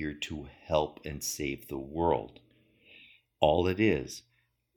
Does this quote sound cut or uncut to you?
cut